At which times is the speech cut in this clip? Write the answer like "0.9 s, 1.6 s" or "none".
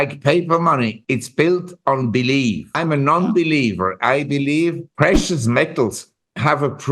1.0 s, 2.8 s, 4.9 s